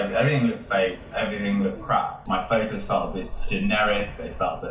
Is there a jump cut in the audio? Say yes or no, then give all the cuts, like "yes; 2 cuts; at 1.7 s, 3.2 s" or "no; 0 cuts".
yes; 1 cut; at 2.2 s